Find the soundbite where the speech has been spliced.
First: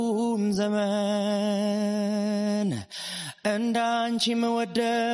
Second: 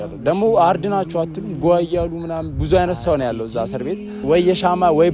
second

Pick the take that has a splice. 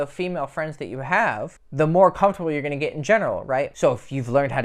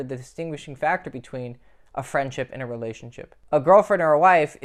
first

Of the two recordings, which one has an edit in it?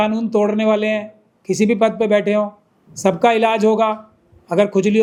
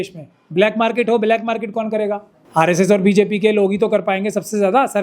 second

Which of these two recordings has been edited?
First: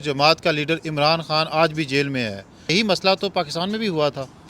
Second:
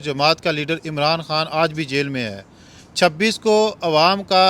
first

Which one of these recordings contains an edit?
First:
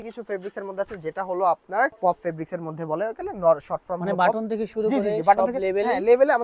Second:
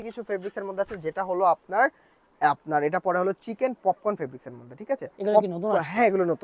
first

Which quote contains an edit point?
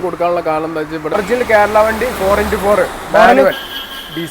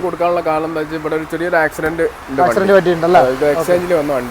first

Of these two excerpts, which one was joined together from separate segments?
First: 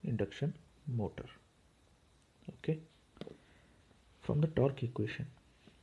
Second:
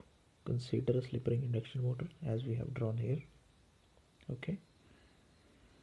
first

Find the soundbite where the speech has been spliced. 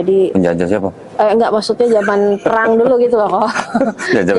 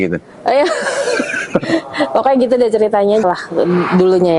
second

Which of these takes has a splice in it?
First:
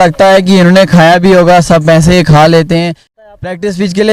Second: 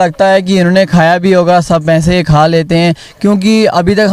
first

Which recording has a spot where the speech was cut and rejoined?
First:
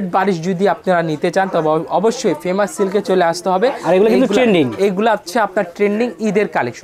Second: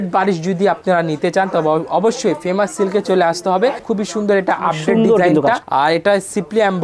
second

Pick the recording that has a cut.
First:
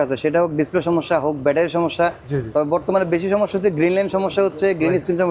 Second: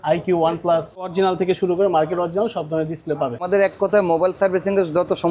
second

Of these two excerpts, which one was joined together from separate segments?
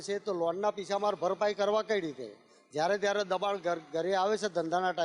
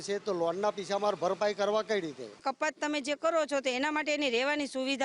second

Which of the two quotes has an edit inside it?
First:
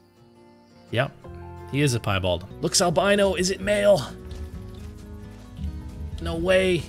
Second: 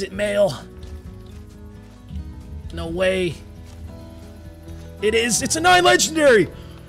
first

